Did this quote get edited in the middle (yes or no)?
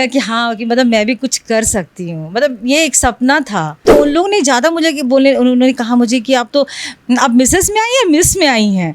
yes